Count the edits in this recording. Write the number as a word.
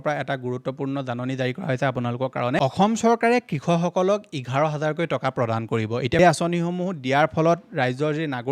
two